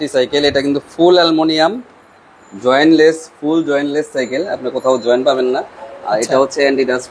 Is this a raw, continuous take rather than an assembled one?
yes; 0 cuts

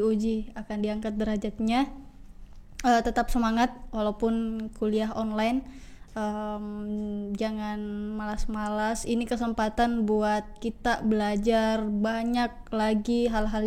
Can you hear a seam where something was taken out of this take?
no; 0 cuts

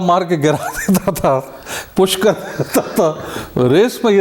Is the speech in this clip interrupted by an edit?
no; 0 cuts

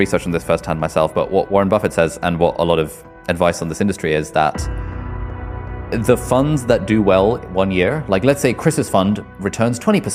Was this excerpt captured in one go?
yes; 0 cuts

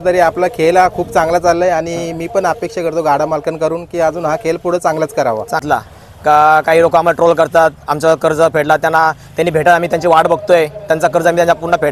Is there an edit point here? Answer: yes; 1 cut; at 5.6 s

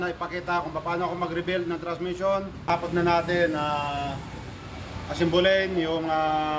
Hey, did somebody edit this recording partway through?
yes; 1 cut; at 2.6 s

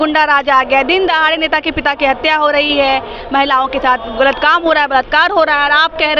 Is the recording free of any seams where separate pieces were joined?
yes; 0 cuts

